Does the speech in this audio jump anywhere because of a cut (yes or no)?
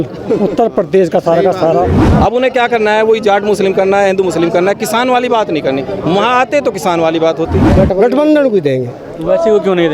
yes